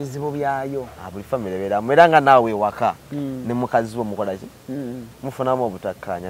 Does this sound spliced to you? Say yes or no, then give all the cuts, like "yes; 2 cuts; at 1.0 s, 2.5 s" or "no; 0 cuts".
no; 0 cuts